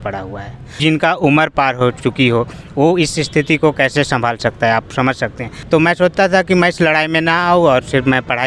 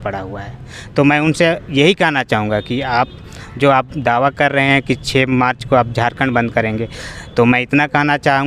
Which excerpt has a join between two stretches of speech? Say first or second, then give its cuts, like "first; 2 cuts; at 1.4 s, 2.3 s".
first; 2 cuts; at 0.8 s, 5.5 s